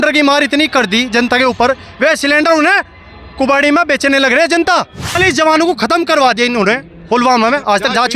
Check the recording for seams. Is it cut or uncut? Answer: cut